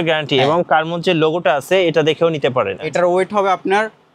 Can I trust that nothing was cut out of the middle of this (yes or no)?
no